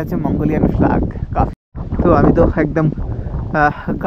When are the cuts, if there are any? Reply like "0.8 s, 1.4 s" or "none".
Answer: 1.5 s